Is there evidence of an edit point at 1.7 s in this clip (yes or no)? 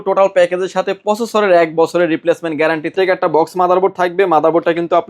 no